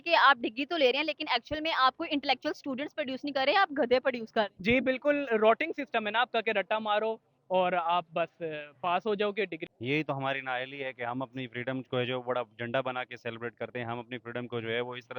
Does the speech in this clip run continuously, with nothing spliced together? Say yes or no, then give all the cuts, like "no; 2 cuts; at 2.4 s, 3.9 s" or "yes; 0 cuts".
no; 1 cut; at 9.6 s